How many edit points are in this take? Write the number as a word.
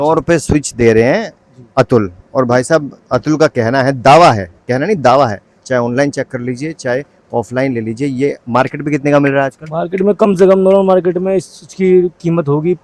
zero